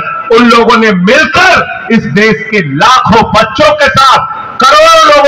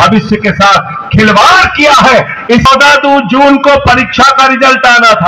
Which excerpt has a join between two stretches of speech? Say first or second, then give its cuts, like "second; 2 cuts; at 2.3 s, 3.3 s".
second; 1 cut; at 2.7 s